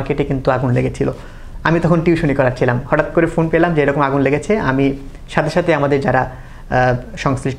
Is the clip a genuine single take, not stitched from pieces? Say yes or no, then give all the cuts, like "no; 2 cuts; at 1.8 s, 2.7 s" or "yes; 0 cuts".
yes; 0 cuts